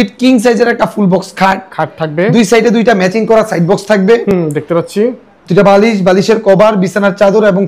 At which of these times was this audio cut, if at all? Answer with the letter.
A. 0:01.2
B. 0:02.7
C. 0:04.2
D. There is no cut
D